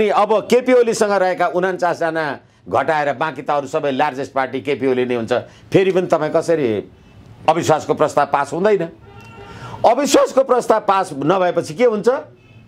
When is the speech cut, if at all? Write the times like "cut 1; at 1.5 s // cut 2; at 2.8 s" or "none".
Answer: cut 1; at 7.4 s